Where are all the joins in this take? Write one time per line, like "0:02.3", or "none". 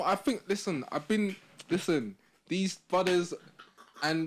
none